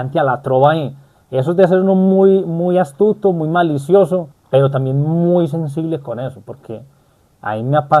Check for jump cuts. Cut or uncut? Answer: cut